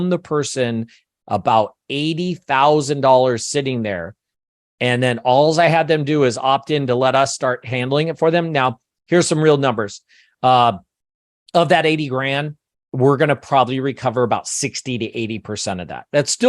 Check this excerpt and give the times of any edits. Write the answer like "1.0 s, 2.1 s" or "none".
none